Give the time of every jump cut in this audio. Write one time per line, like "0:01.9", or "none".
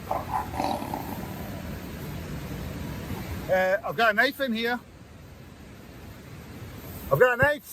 0:03.1